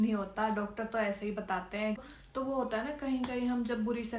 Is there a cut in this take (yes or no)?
yes